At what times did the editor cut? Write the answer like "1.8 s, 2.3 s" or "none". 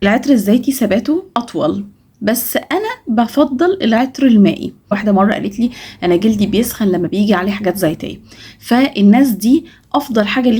1.4 s, 5.0 s